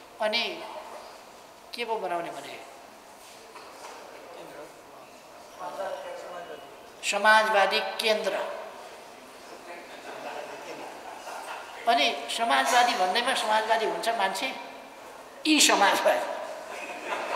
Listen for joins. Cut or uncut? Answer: uncut